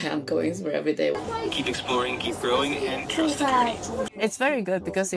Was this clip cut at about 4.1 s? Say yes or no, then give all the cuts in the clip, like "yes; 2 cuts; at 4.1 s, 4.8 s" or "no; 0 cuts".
yes; 2 cuts; at 1.1 s, 4.1 s